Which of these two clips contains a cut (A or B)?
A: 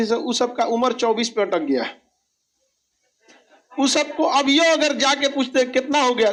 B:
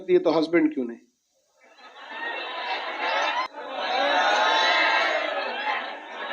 B